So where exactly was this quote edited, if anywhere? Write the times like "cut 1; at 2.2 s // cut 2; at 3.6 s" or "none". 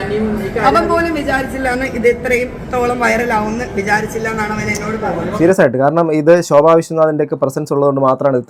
none